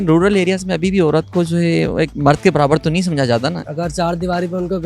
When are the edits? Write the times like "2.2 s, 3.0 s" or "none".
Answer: 2.1 s, 3.6 s